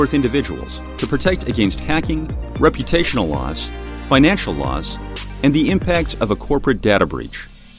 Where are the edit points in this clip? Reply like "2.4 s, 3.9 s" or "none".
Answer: none